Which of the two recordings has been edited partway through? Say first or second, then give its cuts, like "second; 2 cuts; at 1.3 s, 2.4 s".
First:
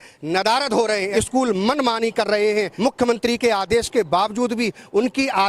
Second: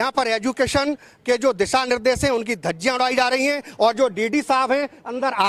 first; 2 cuts; at 1.1 s, 2.7 s